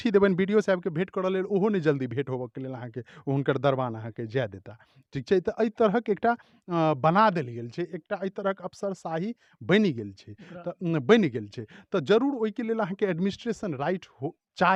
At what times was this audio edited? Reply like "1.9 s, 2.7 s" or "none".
none